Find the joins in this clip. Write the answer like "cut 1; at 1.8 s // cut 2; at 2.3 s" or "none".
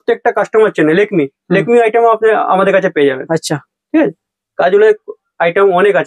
none